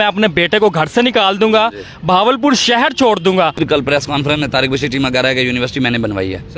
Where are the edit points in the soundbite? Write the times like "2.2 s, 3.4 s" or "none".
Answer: 3.6 s